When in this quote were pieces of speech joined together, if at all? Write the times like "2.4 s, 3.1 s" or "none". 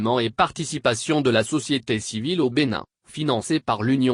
3.1 s